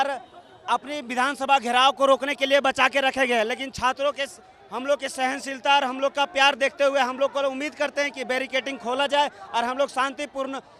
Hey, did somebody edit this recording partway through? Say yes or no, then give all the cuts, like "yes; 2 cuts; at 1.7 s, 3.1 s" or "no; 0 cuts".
no; 0 cuts